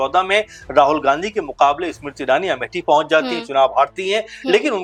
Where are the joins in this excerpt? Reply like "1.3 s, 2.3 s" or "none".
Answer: none